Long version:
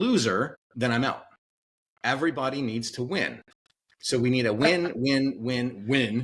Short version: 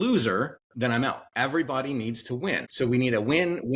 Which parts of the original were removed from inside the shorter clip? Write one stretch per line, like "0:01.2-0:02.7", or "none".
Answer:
0:01.2-0:01.9
0:03.3-0:04.0